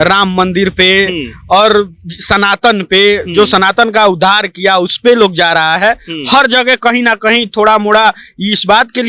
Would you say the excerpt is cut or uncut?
uncut